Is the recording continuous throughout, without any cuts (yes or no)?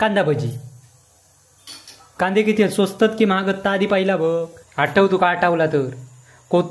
no